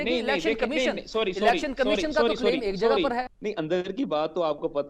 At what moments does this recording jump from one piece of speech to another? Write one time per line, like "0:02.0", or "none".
0:03.3